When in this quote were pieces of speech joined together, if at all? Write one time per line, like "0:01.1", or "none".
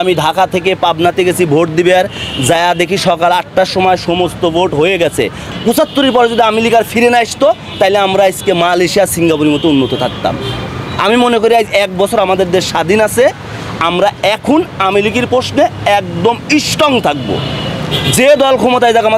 0:05.5